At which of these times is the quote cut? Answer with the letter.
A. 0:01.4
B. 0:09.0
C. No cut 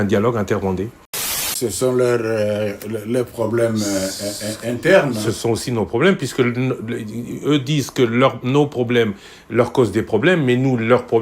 A